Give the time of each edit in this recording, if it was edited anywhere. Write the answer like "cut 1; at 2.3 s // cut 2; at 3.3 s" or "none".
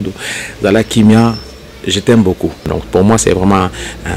cut 1; at 2.8 s